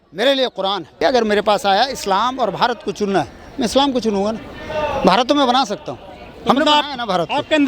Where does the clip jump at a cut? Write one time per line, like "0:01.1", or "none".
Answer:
0:01.0